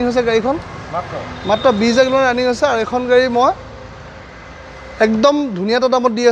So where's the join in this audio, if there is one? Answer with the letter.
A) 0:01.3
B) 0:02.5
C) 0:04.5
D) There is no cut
D